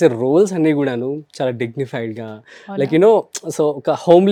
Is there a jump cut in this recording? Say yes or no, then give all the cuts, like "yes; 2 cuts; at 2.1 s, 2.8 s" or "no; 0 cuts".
no; 0 cuts